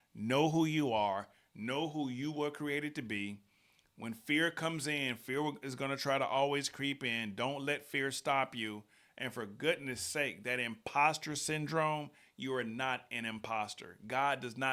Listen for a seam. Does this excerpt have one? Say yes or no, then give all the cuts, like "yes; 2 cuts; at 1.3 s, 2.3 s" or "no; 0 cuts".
no; 0 cuts